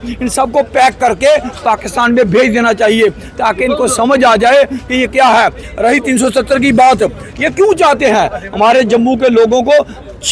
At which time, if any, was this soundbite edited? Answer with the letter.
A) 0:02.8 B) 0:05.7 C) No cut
C